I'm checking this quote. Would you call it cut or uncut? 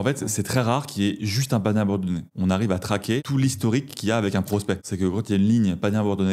cut